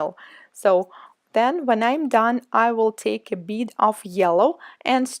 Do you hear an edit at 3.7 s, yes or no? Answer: no